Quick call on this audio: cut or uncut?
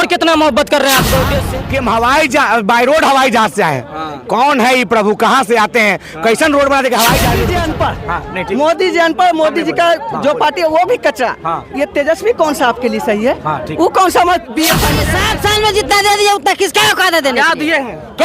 cut